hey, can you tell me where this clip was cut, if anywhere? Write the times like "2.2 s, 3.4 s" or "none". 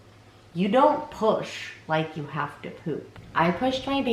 3.2 s